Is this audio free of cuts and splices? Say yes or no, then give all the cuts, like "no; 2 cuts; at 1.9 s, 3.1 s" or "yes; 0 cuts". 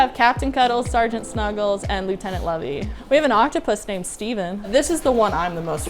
no; 1 cut; at 4.6 s